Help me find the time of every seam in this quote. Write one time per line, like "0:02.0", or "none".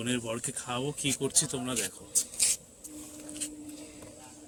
none